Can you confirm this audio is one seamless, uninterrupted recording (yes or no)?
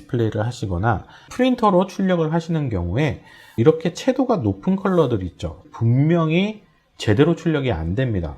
no